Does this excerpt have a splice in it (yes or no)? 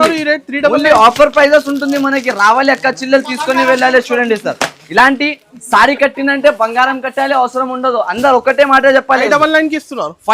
yes